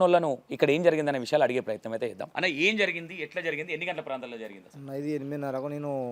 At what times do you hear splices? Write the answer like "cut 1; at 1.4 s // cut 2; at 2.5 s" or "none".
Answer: cut 1; at 2.2 s